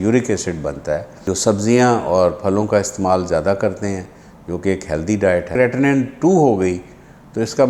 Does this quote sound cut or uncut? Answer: cut